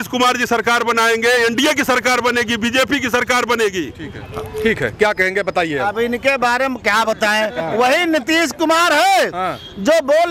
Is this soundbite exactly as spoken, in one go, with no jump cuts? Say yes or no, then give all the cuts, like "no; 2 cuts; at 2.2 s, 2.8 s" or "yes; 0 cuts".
yes; 0 cuts